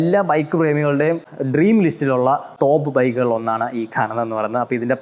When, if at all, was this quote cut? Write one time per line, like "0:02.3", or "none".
0:01.3
0:02.5